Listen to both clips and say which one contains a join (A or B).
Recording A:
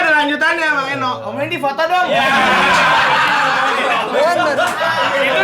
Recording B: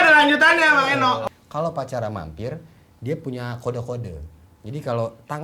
B